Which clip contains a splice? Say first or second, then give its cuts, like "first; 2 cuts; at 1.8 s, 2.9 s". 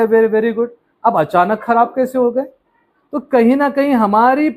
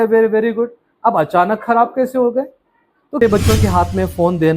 second; 1 cut; at 3.2 s